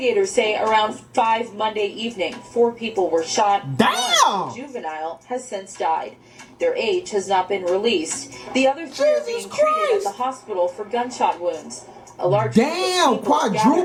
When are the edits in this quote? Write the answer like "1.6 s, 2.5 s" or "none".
none

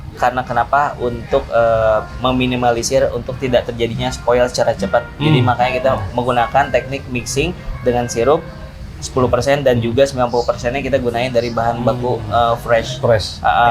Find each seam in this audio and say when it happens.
none

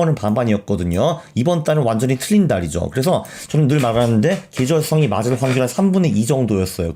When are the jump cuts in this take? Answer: none

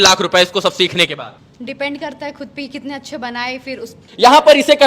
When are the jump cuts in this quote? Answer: 1.4 s, 4.0 s

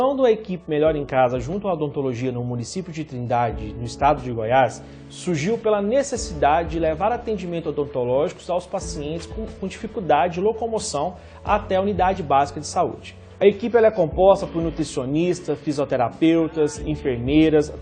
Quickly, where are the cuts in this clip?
none

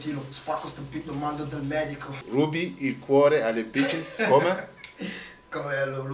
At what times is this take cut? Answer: 2.2 s

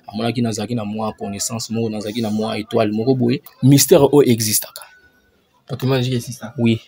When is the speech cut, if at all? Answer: 3.5 s

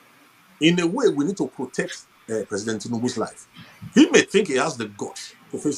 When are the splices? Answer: none

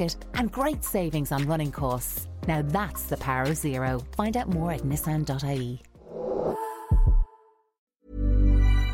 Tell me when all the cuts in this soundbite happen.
8.0 s

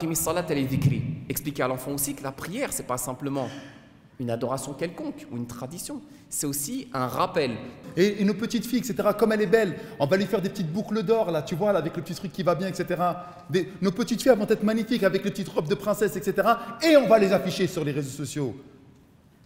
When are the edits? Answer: 7.8 s

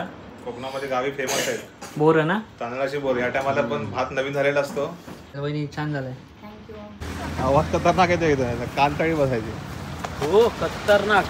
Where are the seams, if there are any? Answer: 5.4 s, 7.0 s

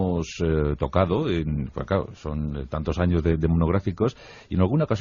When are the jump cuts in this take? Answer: none

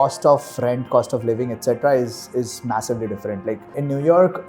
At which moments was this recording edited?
none

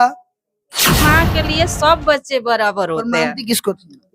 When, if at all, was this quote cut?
1.0 s

